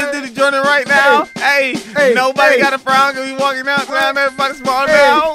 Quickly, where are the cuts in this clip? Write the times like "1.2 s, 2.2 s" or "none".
none